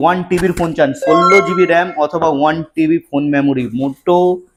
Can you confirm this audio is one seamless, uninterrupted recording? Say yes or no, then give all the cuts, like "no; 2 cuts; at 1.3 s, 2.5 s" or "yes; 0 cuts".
yes; 0 cuts